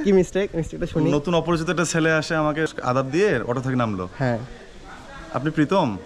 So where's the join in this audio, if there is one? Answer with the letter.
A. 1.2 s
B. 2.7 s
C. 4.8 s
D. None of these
B